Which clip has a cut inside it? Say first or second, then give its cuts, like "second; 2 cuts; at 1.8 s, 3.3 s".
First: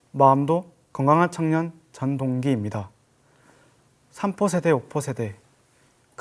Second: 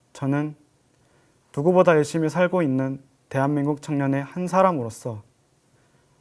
second; 1 cut; at 3.9 s